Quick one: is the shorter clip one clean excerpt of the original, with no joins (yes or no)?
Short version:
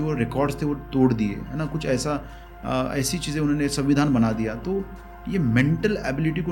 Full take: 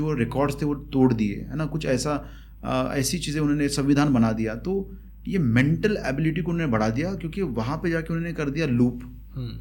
yes